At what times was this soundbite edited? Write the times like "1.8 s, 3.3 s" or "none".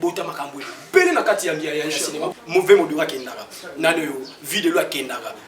2.2 s